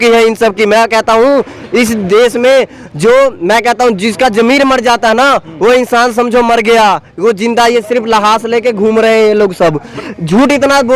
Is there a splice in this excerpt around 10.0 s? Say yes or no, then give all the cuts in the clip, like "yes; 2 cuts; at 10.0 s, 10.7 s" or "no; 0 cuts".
yes; 1 cut; at 10.0 s